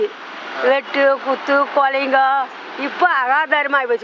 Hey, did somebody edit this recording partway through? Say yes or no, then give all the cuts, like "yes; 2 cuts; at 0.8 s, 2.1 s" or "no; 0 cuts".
no; 0 cuts